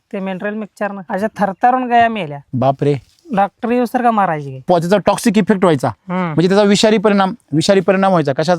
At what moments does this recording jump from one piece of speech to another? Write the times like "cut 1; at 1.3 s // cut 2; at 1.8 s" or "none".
cut 1; at 1.0 s // cut 2; at 2.4 s // cut 3; at 4.6 s